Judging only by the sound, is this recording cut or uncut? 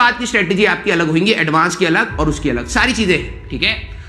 uncut